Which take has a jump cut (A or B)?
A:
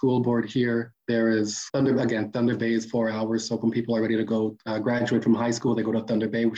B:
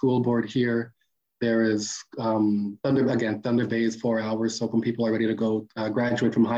A